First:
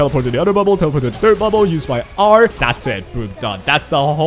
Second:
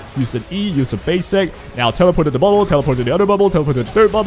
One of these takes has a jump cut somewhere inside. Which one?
first; 1 cut; at 2.6 s

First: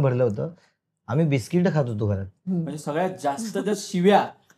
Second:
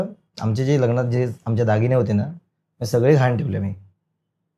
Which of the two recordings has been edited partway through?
first; 1 cut; at 2.3 s

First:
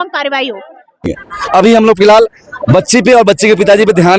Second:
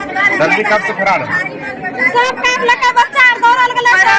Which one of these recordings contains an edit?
first; 1 cut; at 1.1 s

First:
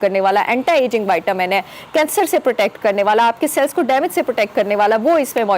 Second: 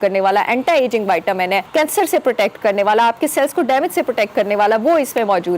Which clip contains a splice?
second; 1 cut; at 1.7 s

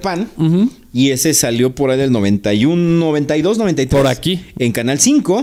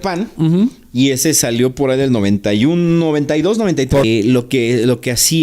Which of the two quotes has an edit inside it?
second; 1 cut; at 4.0 s

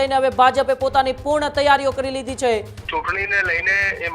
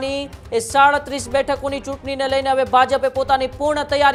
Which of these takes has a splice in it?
first; 1 cut; at 2.8 s

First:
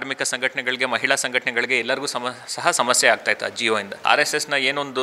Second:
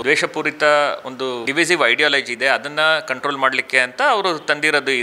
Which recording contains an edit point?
first; 1 cut; at 4.0 s

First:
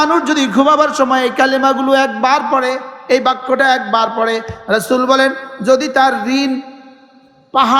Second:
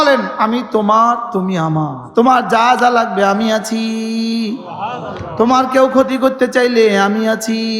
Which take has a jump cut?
second; 1 cut; at 2.0 s

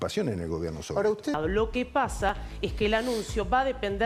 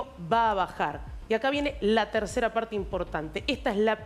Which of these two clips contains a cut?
first; 1 cut; at 1.3 s

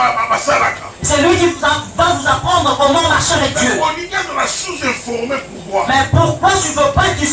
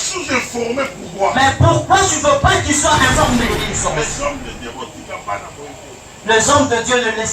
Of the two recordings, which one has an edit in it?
second; 1 cut; at 3.8 s

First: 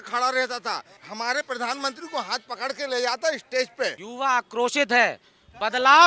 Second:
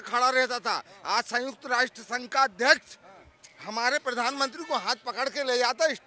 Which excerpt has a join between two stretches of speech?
first; 2 cuts; at 0.9 s, 4.0 s

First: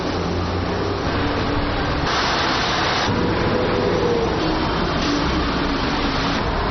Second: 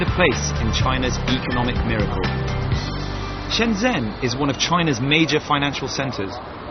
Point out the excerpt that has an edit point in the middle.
first; 1 cut; at 3.2 s

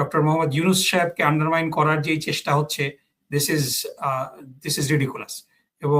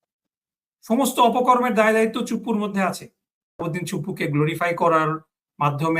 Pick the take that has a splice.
second; 1 cut; at 3.6 s

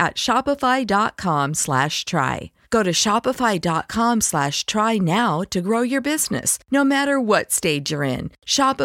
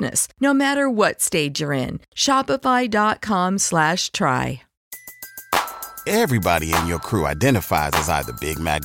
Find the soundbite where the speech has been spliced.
second; 1 cut; at 4.9 s

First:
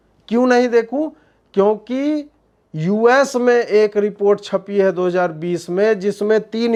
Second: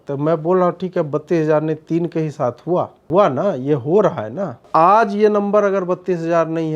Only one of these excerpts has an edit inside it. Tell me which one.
second; 2 cuts; at 3.0 s, 4.7 s

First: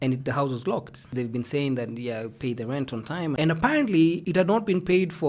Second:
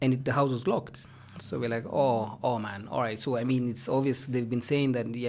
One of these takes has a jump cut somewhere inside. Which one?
first; 2 cuts; at 1.1 s, 3.4 s

